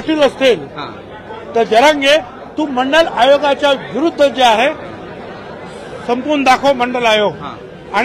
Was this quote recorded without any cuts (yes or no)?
yes